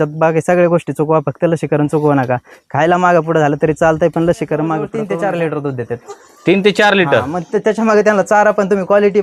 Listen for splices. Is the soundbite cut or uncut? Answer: cut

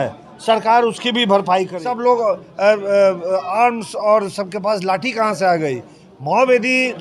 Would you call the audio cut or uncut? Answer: cut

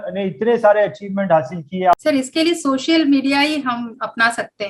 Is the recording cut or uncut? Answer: cut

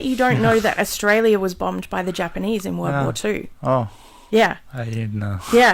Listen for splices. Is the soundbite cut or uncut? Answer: uncut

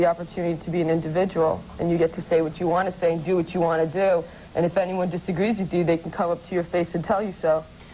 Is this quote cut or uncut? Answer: uncut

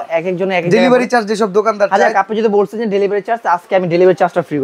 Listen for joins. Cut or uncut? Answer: uncut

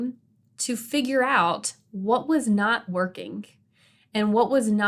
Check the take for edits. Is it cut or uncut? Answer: uncut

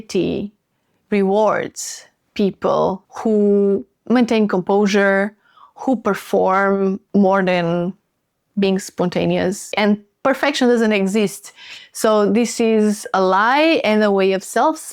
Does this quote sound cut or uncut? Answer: cut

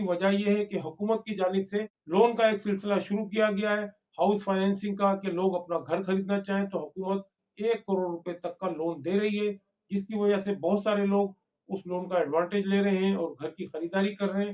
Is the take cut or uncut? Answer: uncut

